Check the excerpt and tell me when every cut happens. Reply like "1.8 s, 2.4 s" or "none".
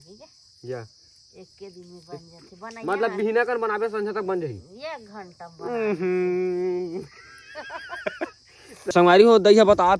8.9 s